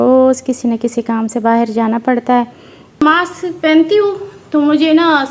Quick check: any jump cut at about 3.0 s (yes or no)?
yes